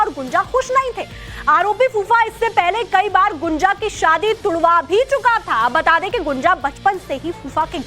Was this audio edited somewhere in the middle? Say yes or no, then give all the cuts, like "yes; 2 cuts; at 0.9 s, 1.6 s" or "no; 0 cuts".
yes; 1 cut; at 5.9 s